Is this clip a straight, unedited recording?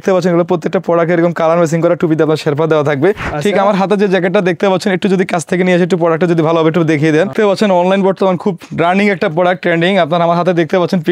no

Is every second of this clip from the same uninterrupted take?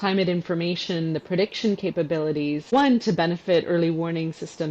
no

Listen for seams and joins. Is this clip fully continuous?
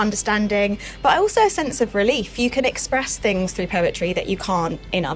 yes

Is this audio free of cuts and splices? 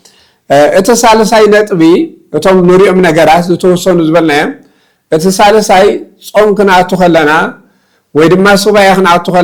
yes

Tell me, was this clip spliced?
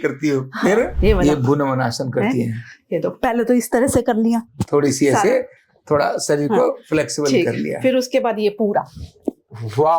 yes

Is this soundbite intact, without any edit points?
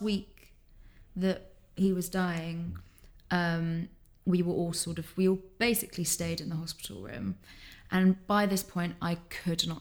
yes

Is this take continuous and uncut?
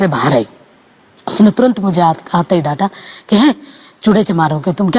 yes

